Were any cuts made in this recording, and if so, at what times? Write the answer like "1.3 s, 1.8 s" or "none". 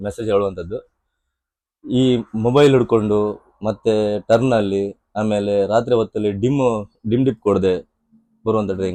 none